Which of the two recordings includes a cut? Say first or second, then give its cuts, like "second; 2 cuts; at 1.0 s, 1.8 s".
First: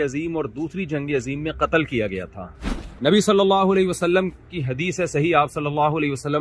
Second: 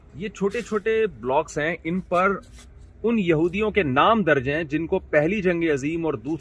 first; 1 cut; at 2.8 s